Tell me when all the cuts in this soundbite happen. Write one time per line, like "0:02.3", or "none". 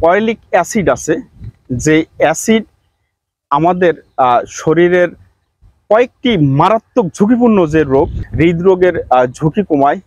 0:08.2